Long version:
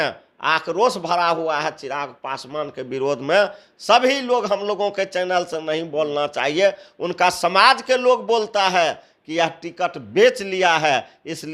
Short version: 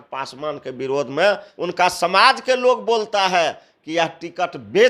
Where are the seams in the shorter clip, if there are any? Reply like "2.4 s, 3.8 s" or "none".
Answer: 1.5 s